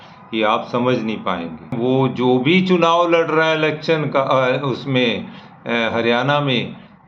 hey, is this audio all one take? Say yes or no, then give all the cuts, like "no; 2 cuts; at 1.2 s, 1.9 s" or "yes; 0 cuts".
no; 1 cut; at 1.8 s